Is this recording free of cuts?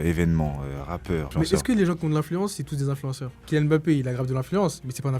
no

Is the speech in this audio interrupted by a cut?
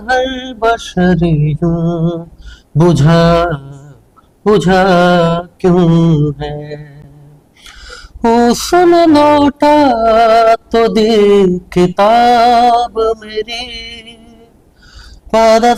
no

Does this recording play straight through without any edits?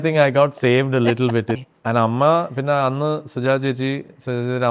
no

